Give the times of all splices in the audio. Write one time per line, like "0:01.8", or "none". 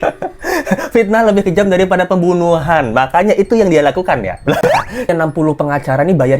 0:05.1